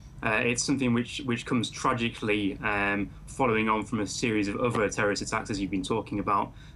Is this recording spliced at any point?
no; 0 cuts

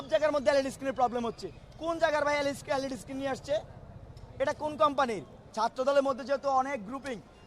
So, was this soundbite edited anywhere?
yes; 1 cut; at 5.4 s

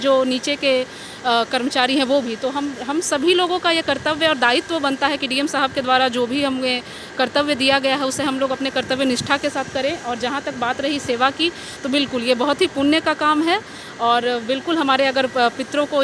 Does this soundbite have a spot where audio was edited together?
no; 0 cuts

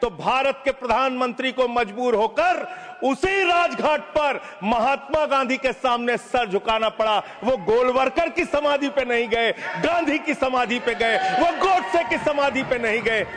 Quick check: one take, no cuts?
yes; 0 cuts

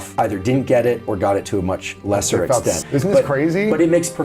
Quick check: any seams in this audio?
yes; 1 cut; at 2.8 s

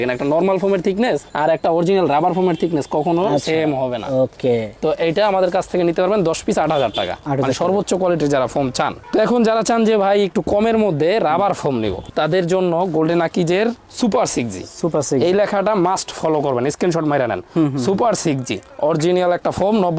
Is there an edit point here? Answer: no; 0 cuts

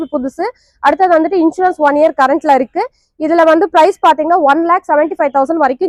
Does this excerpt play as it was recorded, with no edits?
yes; 0 cuts

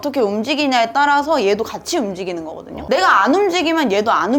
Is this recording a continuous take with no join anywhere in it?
yes; 0 cuts

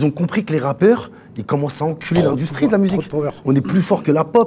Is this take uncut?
yes; 0 cuts

